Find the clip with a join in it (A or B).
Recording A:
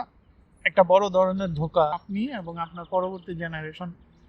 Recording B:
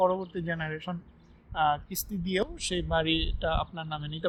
A